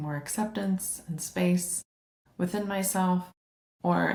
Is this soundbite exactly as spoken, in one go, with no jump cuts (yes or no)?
yes